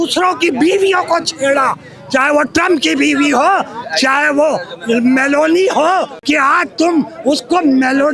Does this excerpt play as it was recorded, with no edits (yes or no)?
yes